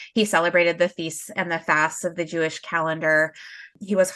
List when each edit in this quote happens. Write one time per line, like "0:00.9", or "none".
none